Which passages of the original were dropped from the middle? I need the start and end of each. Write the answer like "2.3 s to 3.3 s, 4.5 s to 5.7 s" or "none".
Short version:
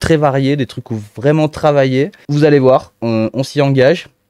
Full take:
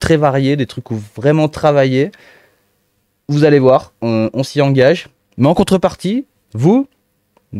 2.2 s to 3.2 s